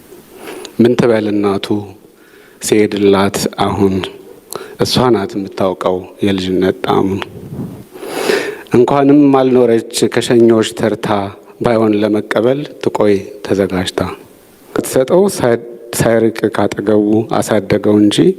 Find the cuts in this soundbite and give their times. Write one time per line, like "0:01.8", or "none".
0:14.9

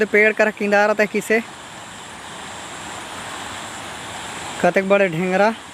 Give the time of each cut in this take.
none

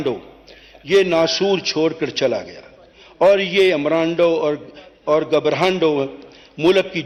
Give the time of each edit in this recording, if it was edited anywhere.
none

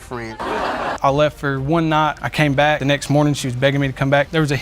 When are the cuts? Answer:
0:00.9

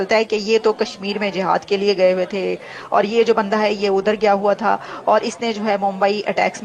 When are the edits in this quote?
none

